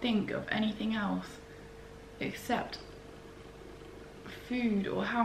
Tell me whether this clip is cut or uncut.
uncut